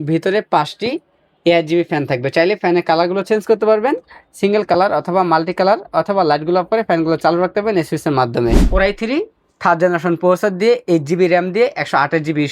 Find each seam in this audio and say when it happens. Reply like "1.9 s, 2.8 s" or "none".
8.7 s